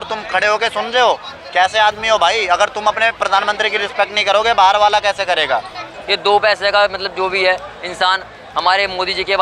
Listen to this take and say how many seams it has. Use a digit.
1